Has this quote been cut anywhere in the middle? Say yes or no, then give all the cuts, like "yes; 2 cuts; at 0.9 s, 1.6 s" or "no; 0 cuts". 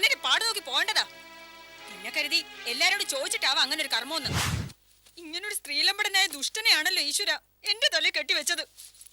yes; 1 cut; at 4.5 s